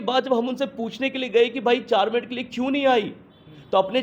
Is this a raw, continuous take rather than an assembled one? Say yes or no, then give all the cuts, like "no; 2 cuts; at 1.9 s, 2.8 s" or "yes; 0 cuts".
yes; 0 cuts